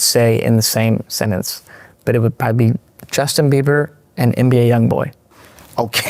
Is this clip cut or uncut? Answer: uncut